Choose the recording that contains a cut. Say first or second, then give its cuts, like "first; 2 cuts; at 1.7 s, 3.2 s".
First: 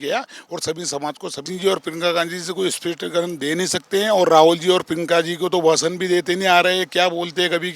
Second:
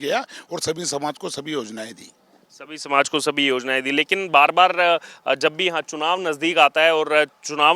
first; 1 cut; at 1.4 s